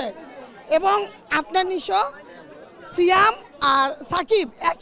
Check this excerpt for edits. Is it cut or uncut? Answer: uncut